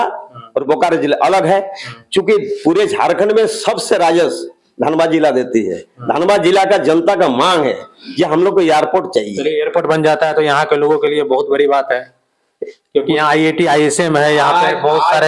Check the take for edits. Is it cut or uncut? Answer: uncut